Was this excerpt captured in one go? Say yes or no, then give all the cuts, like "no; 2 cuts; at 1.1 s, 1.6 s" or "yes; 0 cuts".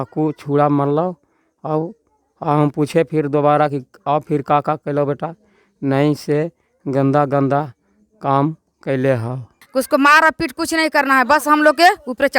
no; 1 cut; at 9.6 s